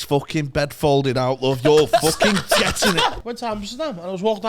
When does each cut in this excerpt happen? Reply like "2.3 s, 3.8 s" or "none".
3.2 s

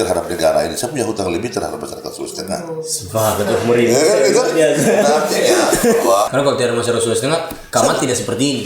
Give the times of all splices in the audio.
6.3 s

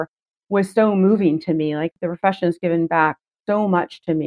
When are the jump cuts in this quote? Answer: 1.9 s

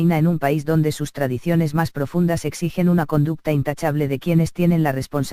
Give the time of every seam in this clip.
4.4 s

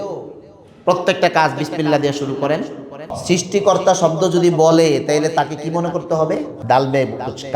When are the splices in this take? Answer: 3.1 s, 6.5 s

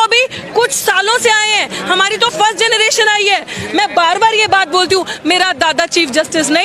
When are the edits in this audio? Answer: none

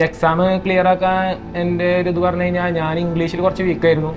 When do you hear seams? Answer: none

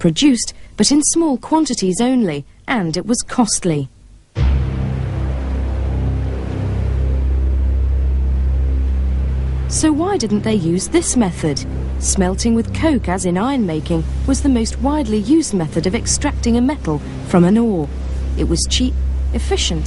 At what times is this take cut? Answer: 2.0 s

